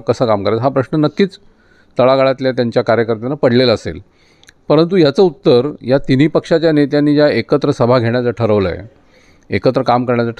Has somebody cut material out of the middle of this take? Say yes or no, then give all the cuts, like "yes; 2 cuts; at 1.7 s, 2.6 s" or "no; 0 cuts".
no; 0 cuts